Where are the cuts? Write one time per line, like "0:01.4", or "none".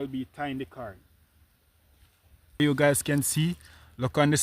0:02.6